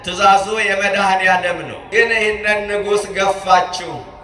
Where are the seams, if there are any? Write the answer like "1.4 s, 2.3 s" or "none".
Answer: 1.8 s

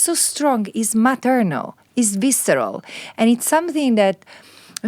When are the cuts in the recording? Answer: none

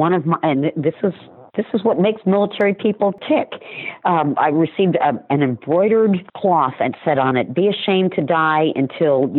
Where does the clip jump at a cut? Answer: 3.2 s, 6.3 s

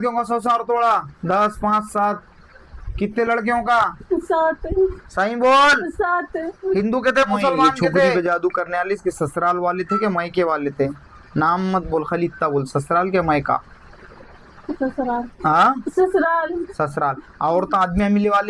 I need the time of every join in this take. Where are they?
8.1 s

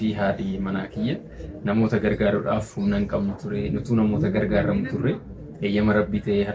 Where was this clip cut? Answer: none

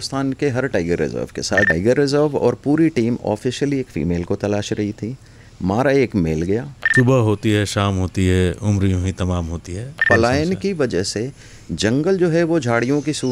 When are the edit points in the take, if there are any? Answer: 1.7 s, 6.8 s, 10.1 s

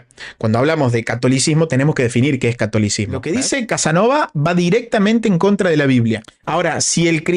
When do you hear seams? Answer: 3.2 s, 6.3 s

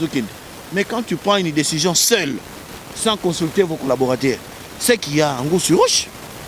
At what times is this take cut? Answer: none

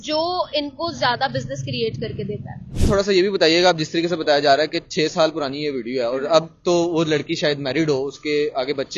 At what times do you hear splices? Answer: 2.7 s

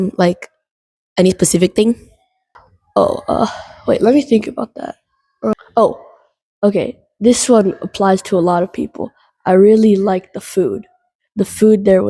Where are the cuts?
none

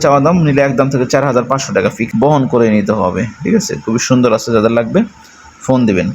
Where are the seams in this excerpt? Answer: 2.0 s

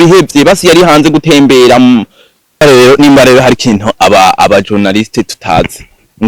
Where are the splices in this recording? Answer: 2.6 s

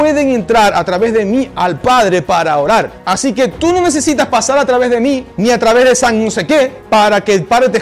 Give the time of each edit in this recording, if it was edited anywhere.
3.0 s, 5.3 s, 6.8 s

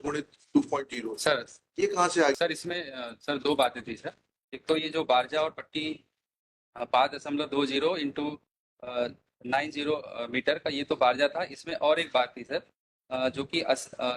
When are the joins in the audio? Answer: 2.4 s

